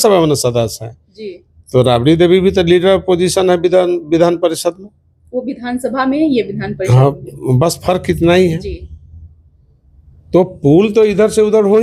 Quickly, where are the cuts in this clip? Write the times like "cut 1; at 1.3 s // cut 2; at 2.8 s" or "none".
none